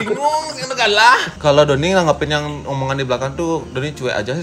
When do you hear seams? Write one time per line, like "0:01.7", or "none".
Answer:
0:01.3